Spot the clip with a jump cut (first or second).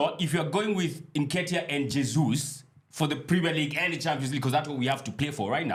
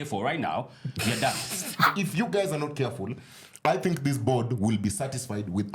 second